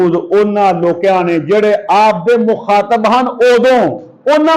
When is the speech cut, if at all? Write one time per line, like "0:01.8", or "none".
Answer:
none

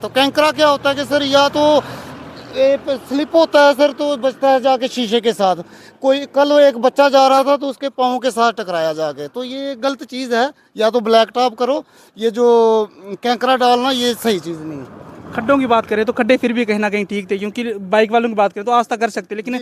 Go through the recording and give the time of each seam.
none

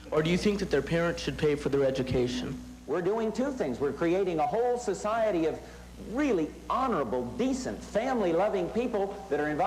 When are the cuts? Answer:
0:02.7

